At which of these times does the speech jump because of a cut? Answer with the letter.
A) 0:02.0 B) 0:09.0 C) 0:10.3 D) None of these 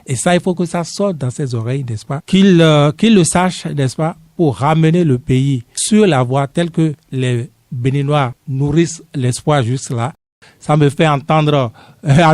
C